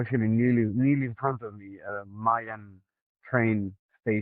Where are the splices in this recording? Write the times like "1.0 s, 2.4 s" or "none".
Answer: none

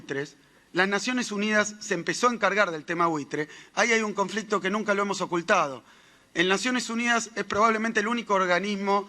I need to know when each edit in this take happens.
4.1 s

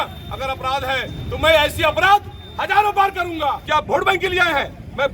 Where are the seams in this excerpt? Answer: 3.6 s

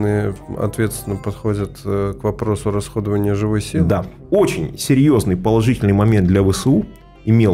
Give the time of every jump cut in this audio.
4.1 s

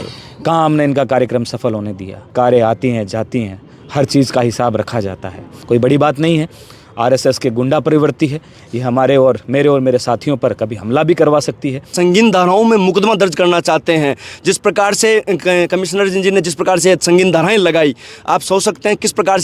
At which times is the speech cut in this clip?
2.3 s, 5.5 s, 11.9 s

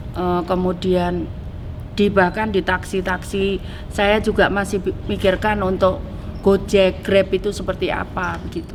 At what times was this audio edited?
none

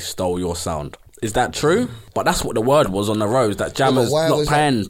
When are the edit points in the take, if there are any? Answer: 1.0 s, 2.0 s

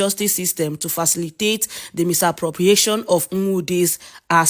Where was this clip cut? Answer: none

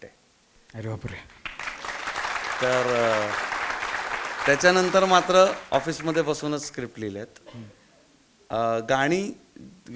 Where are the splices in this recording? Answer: none

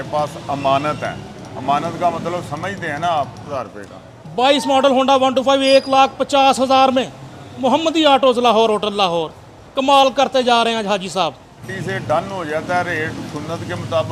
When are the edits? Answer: 3.5 s, 11.7 s

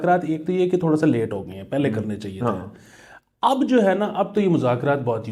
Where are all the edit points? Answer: none

